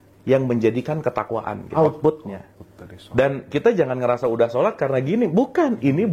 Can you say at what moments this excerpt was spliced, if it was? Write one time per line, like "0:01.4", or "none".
0:01.8